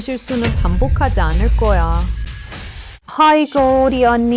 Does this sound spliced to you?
yes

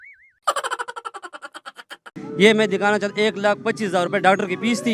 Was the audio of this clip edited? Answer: yes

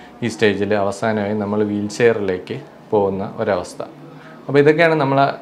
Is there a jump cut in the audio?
no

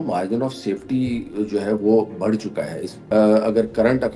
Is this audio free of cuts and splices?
no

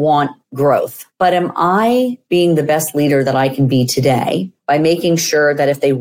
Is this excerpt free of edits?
yes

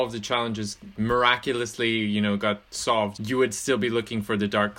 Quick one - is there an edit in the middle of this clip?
yes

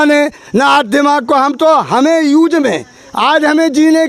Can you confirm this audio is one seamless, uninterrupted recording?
yes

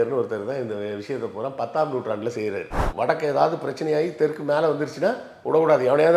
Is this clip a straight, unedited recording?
no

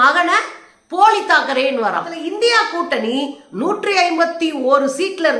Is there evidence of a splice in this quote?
yes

